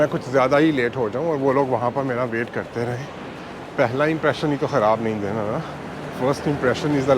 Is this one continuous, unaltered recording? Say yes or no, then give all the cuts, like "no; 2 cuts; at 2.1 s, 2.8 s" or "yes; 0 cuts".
no; 1 cut; at 3.2 s